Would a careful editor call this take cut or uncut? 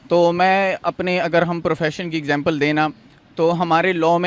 uncut